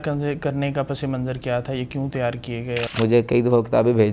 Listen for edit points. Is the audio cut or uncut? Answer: cut